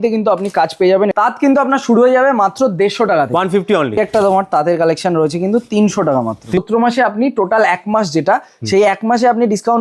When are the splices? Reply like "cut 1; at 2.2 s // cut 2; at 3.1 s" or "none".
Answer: cut 1; at 1.1 s // cut 2; at 4.0 s // cut 3; at 6.6 s